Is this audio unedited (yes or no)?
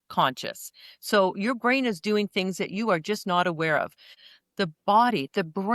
no